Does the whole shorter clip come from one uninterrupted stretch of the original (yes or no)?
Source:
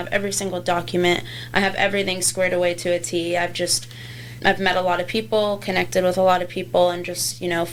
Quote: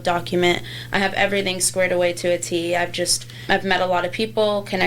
no